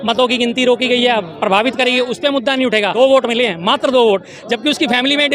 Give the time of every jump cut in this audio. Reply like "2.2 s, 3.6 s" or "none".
2.9 s